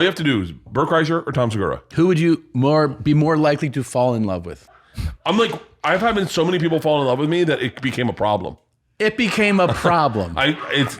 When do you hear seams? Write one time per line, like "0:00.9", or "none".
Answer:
0:01.9
0:04.5